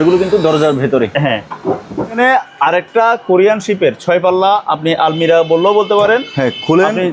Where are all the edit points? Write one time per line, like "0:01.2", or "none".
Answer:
0:02.2